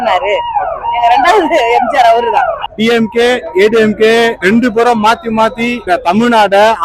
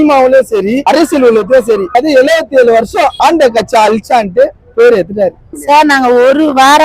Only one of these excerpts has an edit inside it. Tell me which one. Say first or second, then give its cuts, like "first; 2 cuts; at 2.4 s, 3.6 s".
second; 2 cuts; at 1.9 s, 5.5 s